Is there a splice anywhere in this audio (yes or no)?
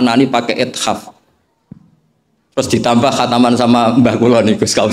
no